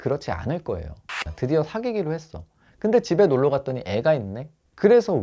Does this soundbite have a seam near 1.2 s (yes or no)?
yes